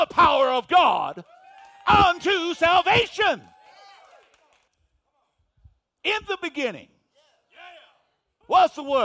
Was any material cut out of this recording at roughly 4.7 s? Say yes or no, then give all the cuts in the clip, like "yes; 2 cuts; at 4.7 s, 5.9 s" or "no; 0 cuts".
yes; 1 cut; at 4.7 s